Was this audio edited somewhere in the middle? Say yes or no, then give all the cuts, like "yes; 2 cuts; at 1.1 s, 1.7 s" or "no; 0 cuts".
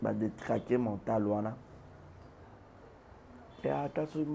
no; 0 cuts